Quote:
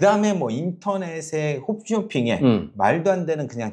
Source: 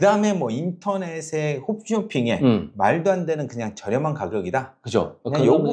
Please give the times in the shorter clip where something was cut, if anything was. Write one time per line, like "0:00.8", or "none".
none